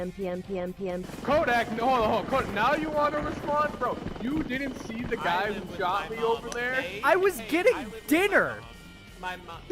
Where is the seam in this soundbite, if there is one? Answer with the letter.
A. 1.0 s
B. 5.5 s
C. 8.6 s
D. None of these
A